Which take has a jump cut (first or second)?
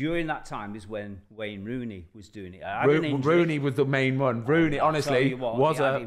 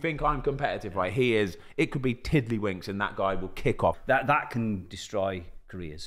second